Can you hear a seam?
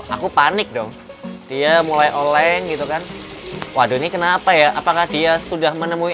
no; 0 cuts

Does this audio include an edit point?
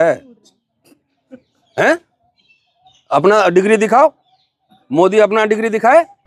no; 0 cuts

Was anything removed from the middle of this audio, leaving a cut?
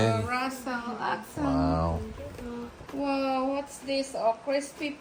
no; 0 cuts

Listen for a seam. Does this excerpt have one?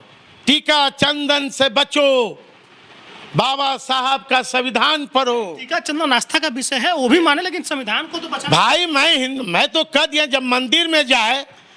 no; 0 cuts

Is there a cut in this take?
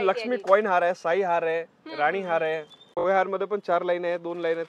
yes; 1 cut; at 2.9 s

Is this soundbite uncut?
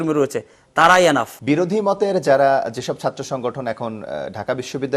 no; 1 cut; at 1.3 s

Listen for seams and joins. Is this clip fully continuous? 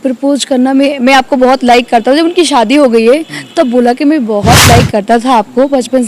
yes; 0 cuts

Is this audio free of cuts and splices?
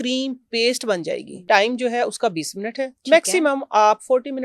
no; 1 cut; at 1.3 s

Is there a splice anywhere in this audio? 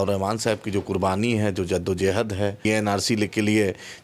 yes; 1 cut; at 2.6 s

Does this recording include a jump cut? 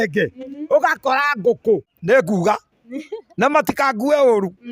yes; 1 cut; at 1.9 s

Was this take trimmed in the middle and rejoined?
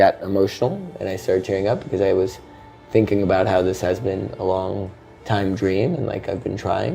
no; 0 cuts

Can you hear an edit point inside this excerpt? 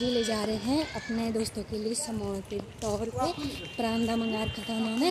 no; 0 cuts

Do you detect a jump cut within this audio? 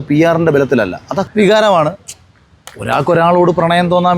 yes; 1 cut; at 1.2 s

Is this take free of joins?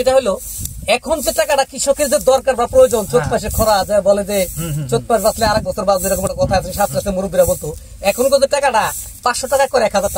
yes; 0 cuts

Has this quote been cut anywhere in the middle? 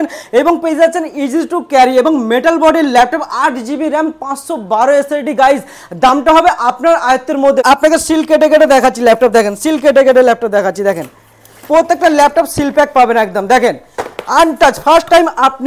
yes; 1 cut; at 7.6 s

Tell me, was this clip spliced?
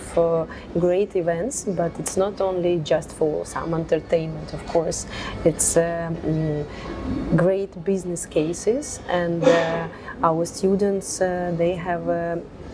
no; 0 cuts

